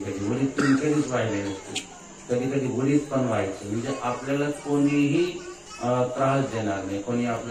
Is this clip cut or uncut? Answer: uncut